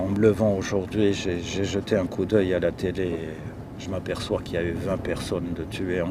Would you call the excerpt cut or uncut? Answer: uncut